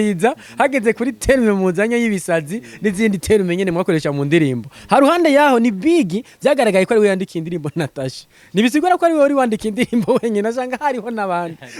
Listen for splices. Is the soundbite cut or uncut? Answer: uncut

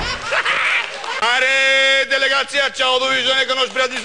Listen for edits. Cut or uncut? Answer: cut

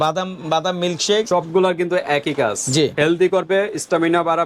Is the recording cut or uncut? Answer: cut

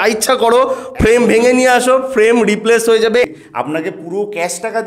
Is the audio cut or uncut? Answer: cut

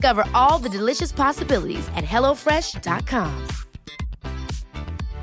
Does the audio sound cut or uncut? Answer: uncut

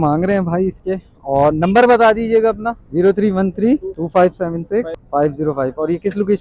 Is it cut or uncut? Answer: uncut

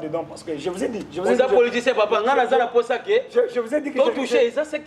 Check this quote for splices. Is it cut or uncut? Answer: uncut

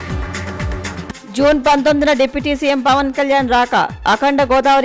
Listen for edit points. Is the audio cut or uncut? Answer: cut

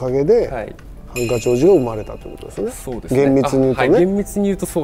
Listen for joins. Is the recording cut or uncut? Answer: uncut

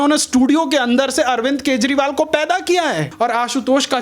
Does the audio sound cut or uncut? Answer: cut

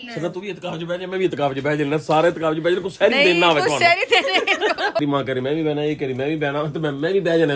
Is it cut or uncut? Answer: cut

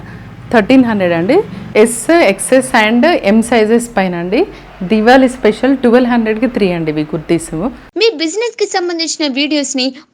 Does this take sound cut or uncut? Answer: cut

